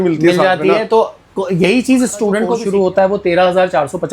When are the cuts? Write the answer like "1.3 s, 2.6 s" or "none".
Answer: 2.6 s